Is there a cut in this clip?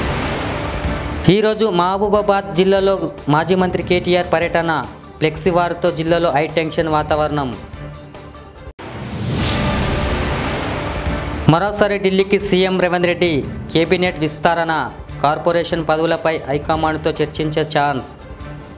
no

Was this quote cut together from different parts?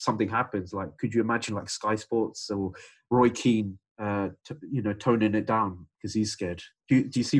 no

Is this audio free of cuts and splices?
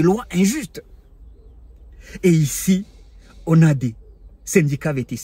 yes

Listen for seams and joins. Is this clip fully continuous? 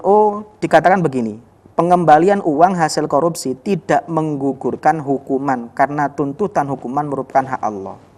yes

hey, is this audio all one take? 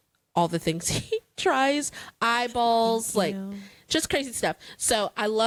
yes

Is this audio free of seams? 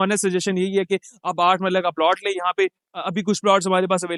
yes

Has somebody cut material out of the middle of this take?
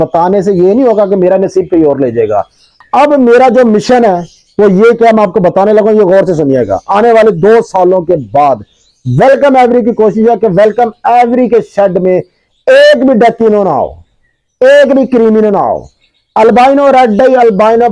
yes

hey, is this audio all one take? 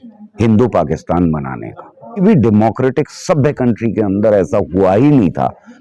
no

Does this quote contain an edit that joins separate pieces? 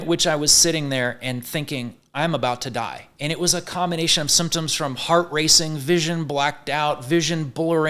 no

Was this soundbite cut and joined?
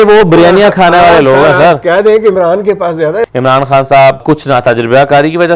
yes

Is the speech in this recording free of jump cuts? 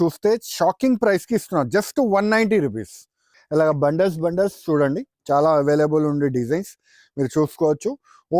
no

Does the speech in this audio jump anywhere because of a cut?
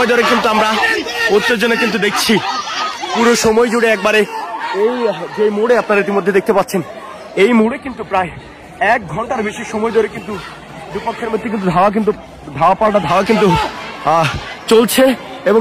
no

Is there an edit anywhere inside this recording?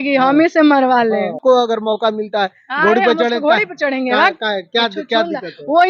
yes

